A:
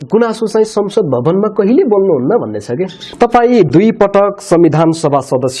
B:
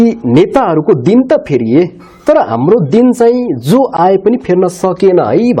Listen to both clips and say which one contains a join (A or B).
A